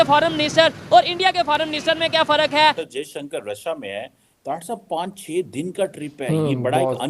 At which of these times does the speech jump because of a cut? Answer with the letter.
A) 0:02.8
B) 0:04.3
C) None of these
A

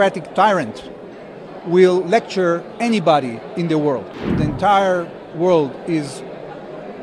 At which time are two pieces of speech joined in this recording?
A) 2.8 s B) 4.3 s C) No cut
B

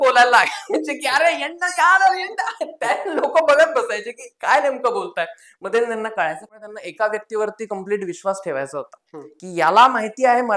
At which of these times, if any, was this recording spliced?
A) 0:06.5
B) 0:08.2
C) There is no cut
A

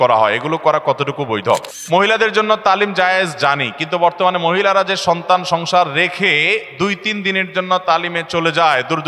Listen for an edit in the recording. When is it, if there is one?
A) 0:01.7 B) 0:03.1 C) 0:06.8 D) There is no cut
A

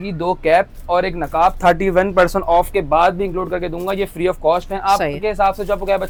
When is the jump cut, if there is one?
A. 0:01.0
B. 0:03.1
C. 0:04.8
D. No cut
D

